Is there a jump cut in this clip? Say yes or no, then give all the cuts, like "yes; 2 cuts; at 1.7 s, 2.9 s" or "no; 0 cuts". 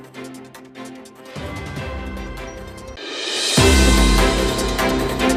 no; 0 cuts